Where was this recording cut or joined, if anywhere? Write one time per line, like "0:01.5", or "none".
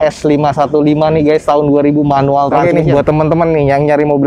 0:02.6